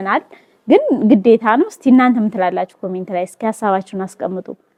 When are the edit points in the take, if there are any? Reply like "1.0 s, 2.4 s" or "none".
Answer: none